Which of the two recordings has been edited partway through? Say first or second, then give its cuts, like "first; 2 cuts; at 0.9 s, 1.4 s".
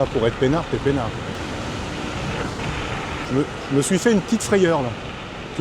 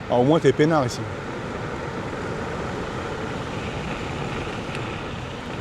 first; 2 cuts; at 1.4 s, 3.2 s